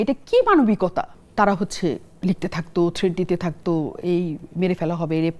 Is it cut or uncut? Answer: cut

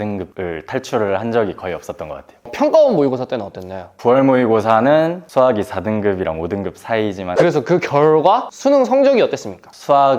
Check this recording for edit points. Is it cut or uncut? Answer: cut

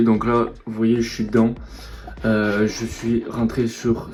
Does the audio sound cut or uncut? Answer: uncut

